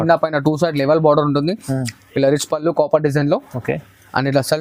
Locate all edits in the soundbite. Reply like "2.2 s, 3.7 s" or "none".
none